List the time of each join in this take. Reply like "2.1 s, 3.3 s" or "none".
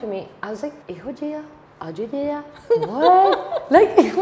0.8 s, 1.6 s

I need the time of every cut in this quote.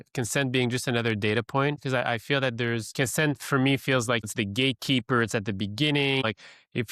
1.8 s, 2.9 s, 4.3 s, 6.2 s

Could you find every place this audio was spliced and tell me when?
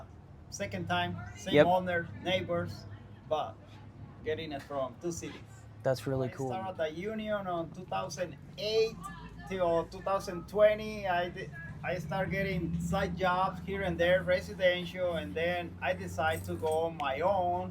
6.6 s

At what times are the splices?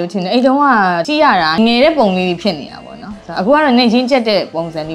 1.1 s

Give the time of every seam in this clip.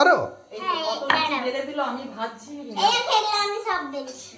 none

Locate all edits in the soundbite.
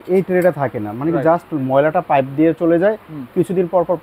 none

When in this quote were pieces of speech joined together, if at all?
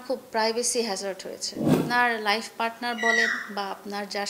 1.8 s

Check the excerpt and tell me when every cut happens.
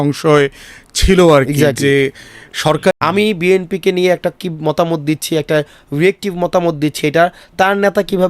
2.9 s

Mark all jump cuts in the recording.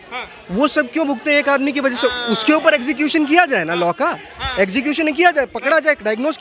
none

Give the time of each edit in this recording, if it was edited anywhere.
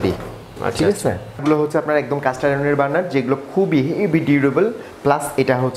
1.4 s

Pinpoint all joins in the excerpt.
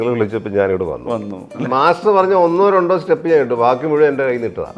1.6 s

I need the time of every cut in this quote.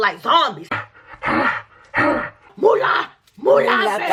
none

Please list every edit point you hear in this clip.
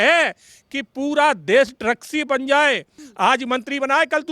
3.0 s

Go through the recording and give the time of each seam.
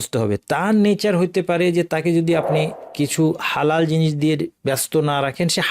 2.8 s, 4.5 s

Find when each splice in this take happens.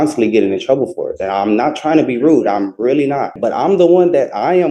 3.3 s

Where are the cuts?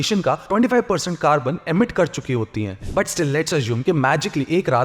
2.8 s

